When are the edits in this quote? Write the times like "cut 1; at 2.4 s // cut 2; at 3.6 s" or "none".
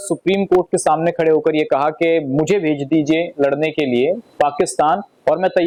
none